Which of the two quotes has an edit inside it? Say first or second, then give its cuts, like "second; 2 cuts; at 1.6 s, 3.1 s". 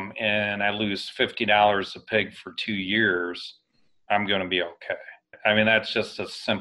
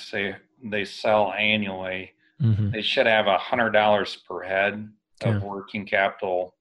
first; 1 cut; at 5.2 s